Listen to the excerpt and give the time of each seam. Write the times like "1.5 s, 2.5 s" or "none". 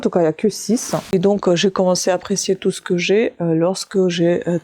1.0 s